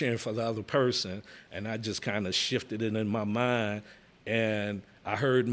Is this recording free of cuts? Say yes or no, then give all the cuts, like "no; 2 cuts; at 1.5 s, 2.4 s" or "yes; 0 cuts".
yes; 0 cuts